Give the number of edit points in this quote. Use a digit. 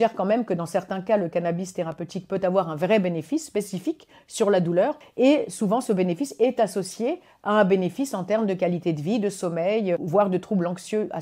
2